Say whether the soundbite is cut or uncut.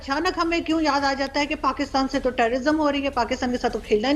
uncut